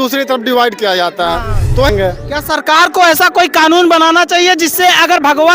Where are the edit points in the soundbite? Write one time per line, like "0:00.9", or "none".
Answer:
0:01.9